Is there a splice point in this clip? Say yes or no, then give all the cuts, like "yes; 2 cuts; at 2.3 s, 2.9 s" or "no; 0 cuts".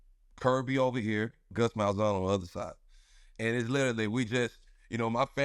yes; 1 cut; at 1.5 s